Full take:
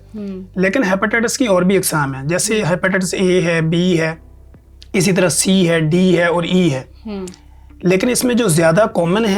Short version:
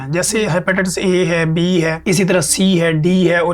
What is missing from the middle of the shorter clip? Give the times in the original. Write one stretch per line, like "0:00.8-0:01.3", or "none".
0:04.1-0:04.9